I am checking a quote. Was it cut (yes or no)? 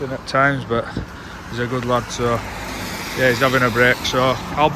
no